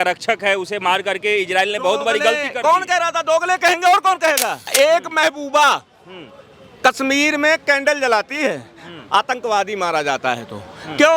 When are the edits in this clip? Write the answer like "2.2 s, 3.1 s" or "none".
4.7 s